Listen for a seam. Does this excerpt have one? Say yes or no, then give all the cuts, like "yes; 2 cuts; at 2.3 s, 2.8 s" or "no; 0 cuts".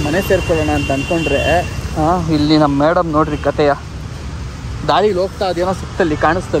no; 0 cuts